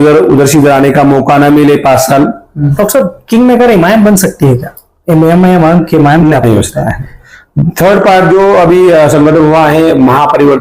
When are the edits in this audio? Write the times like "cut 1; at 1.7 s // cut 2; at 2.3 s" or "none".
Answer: cut 1; at 2.7 s // cut 2; at 6.3 s